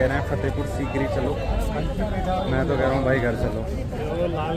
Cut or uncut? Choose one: uncut